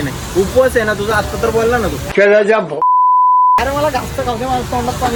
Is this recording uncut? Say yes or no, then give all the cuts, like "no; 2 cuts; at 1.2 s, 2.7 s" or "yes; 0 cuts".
yes; 0 cuts